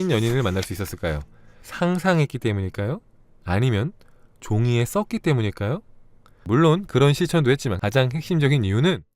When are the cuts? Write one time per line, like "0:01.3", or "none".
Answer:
0:06.4
0:07.7